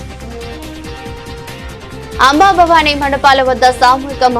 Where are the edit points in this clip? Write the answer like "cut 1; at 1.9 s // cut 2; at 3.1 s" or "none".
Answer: none

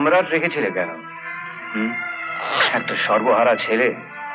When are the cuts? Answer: none

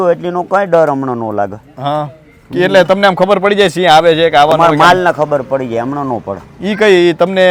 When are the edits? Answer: none

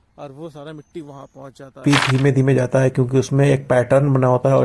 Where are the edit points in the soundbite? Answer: cut 1; at 1.8 s

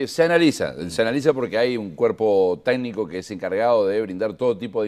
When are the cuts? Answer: cut 1; at 2.4 s

